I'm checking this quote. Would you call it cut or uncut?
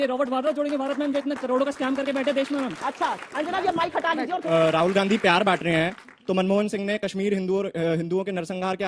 cut